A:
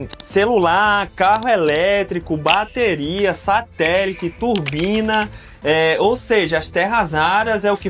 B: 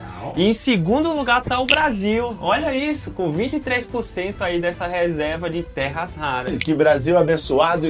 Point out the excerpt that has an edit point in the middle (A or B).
B